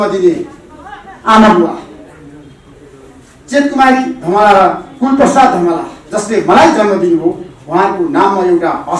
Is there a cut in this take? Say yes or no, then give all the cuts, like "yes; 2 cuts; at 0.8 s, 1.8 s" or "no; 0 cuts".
no; 0 cuts